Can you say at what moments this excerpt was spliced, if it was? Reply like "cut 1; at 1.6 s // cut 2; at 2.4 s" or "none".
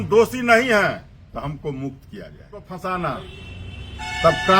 cut 1; at 2.7 s